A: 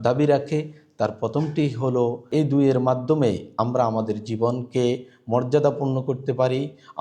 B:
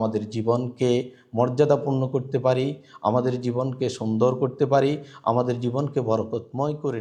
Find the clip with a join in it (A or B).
A